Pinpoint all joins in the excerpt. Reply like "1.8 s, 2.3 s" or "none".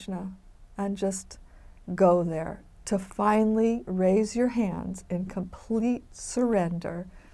none